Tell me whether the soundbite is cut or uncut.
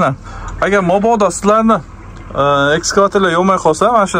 uncut